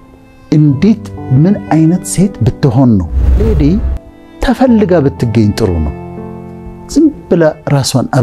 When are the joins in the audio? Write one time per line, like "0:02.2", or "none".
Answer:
0:03.4